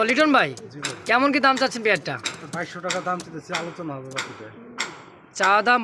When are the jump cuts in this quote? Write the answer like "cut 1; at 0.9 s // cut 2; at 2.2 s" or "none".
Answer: none